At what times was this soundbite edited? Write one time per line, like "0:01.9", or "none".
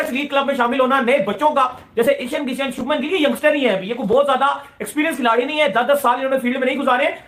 none